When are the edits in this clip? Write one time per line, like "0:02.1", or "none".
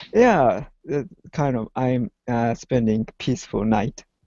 none